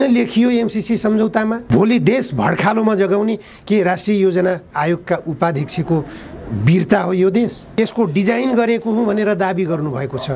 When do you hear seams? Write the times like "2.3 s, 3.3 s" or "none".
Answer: 1.6 s, 7.6 s